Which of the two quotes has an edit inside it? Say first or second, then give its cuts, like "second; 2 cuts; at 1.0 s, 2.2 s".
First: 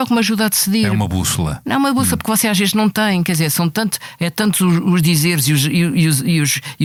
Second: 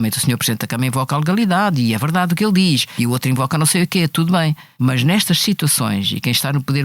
second; 2 cuts; at 2.9 s, 4.6 s